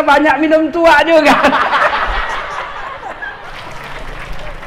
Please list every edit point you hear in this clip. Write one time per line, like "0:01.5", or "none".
0:03.5